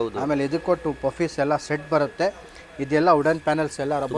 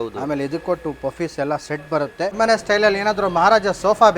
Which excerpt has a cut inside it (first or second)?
second